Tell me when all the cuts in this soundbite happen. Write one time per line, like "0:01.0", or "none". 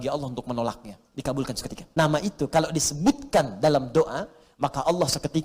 0:01.8